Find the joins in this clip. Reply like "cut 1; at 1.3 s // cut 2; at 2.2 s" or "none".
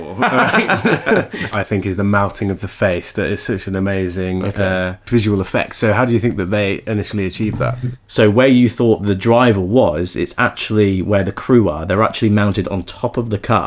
cut 1; at 1.5 s // cut 2; at 8.0 s